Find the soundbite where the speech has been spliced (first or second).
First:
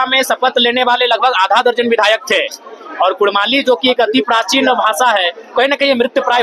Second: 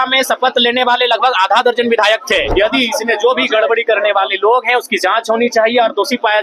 second